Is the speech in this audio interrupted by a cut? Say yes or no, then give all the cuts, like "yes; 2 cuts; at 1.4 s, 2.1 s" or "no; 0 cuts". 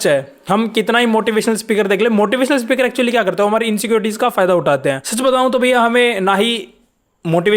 yes; 1 cut; at 5.1 s